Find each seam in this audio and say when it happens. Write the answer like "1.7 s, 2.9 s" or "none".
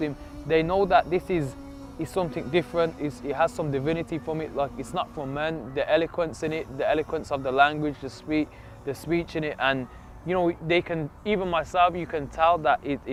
none